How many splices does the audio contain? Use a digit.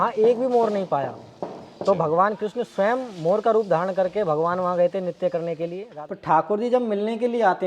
1